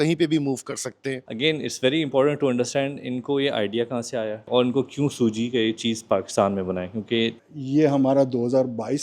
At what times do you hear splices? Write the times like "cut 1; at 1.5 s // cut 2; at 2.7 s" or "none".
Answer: cut 1; at 1.3 s // cut 2; at 4.5 s // cut 3; at 7.4 s

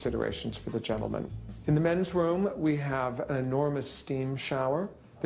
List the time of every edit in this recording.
cut 1; at 3.5 s

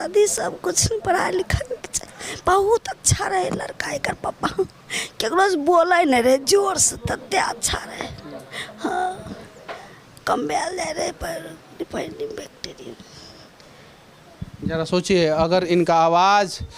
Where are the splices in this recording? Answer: none

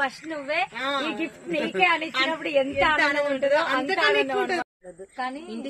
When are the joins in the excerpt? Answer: cut 1; at 4.6 s

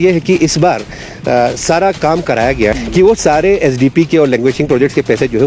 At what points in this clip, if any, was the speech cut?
cut 1; at 2.8 s

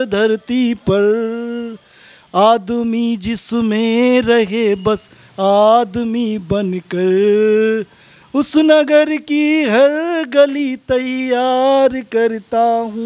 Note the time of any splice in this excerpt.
none

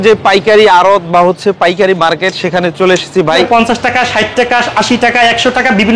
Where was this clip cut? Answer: cut 1; at 3.5 s

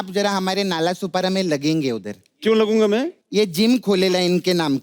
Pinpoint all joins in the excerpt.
cut 1; at 3.2 s

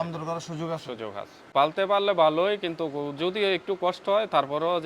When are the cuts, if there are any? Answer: cut 1; at 1.4 s

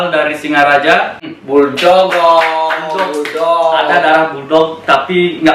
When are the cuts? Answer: cut 1; at 1.1 s

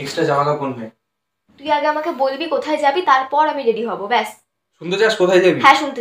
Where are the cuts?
cut 1; at 1.5 s

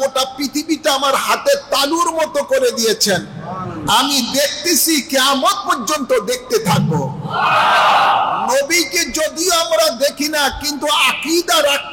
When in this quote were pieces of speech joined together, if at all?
none

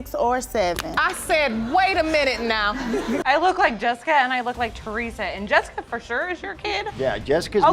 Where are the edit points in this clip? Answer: cut 1; at 3.2 s

